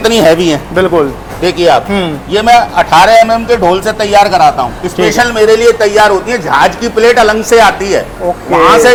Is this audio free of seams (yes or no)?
yes